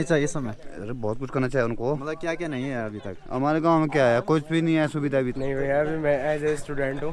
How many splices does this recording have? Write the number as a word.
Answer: one